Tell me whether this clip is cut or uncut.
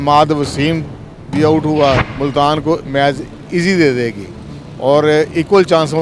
cut